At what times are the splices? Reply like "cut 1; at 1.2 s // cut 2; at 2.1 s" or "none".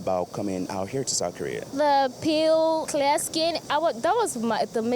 cut 1; at 1.7 s // cut 2; at 3.2 s

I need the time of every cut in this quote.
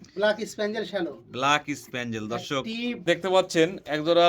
cut 1; at 3.0 s

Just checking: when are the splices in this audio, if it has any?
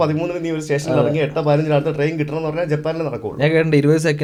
none

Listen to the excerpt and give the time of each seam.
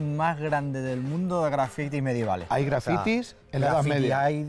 cut 1; at 2.4 s

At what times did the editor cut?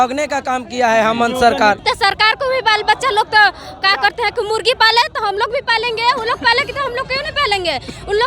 cut 1; at 1.8 s

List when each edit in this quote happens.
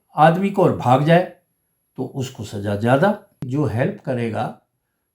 cut 1; at 3.4 s

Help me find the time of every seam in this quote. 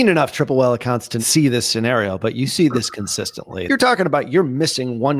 cut 1; at 1.1 s // cut 2; at 3.5 s

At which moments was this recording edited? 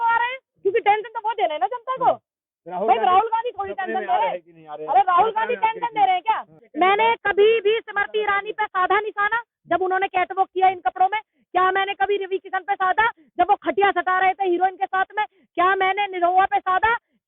cut 1; at 6.6 s

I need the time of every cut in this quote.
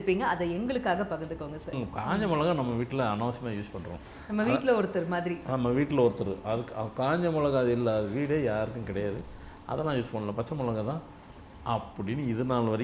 cut 1; at 1.8 s

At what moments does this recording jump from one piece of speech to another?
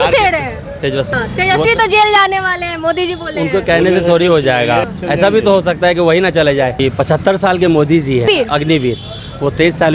cut 1; at 1.1 s // cut 2; at 4.9 s // cut 3; at 6.8 s // cut 4; at 8.3 s

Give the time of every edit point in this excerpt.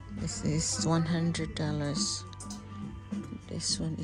none

